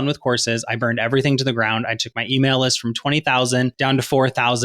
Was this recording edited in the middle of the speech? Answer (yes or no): yes